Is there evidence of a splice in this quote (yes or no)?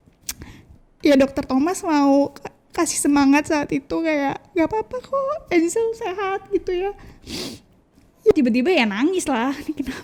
yes